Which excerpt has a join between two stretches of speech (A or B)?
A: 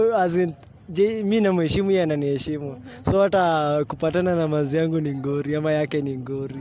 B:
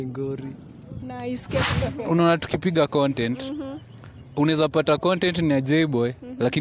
B